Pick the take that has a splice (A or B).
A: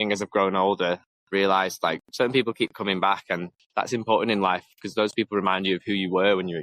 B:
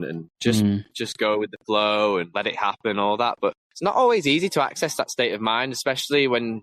A